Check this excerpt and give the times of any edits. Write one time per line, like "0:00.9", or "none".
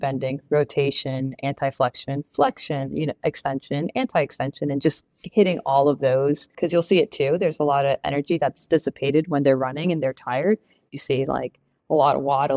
0:06.5